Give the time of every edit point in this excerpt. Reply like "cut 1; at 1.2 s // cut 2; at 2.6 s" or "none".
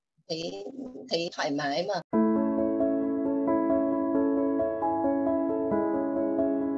cut 1; at 2.1 s